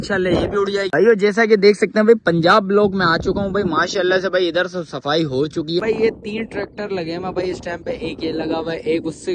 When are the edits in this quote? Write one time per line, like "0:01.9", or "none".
0:00.9
0:05.8